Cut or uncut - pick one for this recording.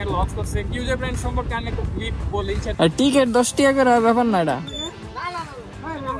cut